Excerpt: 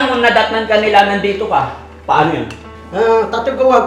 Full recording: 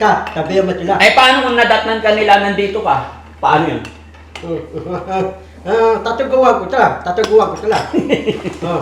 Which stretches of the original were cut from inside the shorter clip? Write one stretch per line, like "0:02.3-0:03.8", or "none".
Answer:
0:04.1-0:05.5

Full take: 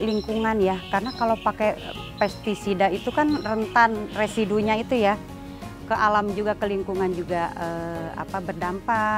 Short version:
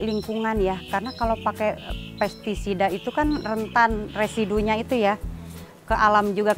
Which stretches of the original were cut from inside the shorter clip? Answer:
none

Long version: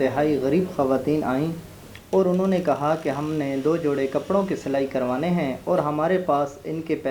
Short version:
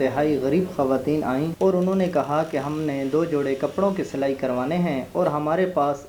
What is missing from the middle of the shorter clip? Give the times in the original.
0:01.5-0:02.0

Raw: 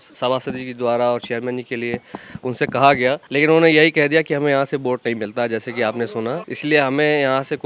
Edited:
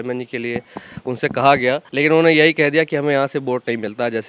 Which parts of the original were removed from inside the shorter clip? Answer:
none

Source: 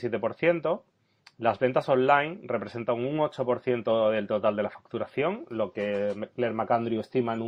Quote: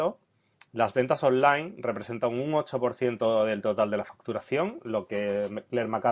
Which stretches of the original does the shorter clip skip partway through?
none

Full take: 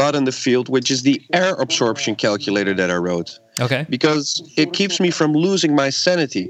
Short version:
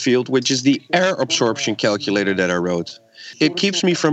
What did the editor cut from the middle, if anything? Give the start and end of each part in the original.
0:03.6-0:04.3

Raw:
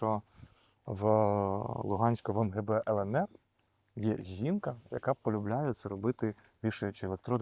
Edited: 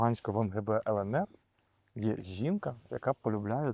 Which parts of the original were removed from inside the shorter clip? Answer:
none

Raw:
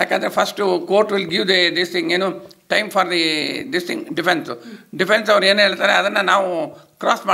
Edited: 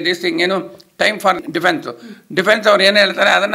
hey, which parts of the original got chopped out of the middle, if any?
0:03.1-0:04.0

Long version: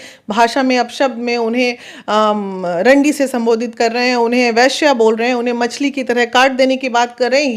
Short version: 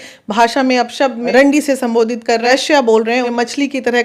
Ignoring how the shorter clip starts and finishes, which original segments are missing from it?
0:01.3-0:02.8
0:03.9-0:04.6
0:05.4-0:05.5

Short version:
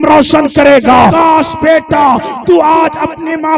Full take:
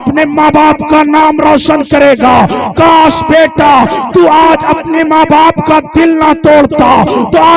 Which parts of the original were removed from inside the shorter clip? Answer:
0:02.5-0:02.8

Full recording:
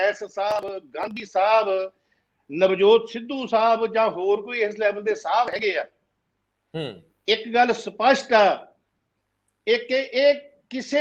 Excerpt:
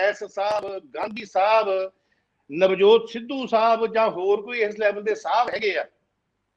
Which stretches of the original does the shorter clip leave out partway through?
none

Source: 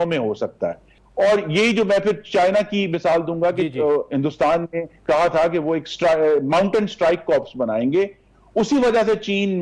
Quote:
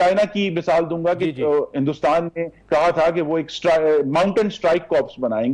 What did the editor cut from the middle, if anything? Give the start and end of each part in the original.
none

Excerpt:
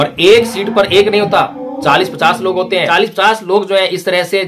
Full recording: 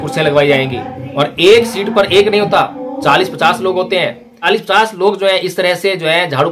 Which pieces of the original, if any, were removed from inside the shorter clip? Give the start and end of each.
0:04.1-0:04.4

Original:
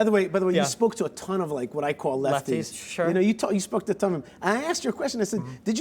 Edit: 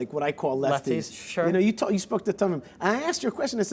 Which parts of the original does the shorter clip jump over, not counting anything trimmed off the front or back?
none

